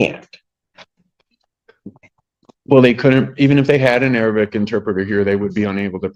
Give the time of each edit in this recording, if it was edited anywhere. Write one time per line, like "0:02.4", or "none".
none